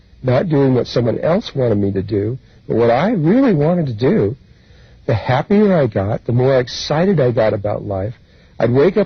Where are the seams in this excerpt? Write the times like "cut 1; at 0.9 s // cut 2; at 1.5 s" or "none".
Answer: cut 1; at 2.1 s